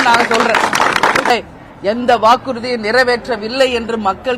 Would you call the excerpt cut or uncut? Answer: cut